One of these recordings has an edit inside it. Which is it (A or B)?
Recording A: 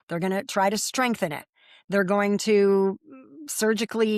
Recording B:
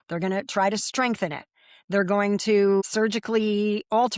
B